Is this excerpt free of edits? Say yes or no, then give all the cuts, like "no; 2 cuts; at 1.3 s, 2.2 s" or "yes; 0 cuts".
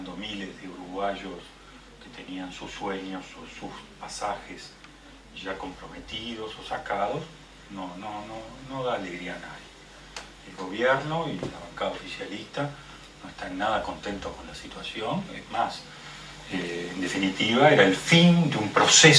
yes; 0 cuts